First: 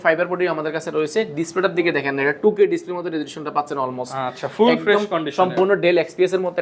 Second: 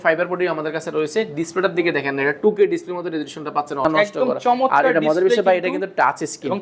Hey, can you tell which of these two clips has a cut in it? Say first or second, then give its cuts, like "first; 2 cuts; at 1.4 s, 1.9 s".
second; 1 cut; at 3.8 s